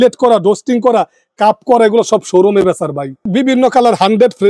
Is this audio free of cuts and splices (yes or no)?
no